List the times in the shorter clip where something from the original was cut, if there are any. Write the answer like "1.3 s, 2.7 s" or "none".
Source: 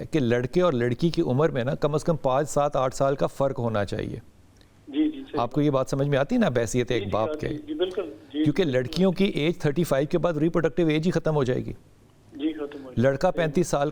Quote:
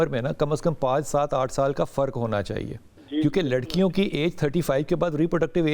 3.0 s